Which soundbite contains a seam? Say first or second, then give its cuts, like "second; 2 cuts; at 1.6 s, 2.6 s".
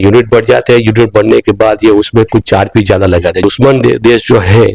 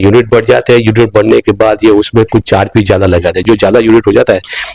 first; 1 cut; at 3.4 s